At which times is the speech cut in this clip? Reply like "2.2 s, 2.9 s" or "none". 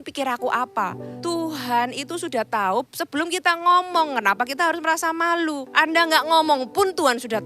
1.1 s, 2.9 s, 5.8 s